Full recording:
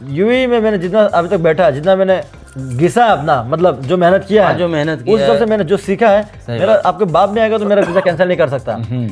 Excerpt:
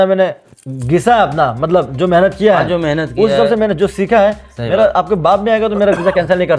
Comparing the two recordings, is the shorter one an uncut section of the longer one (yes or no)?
yes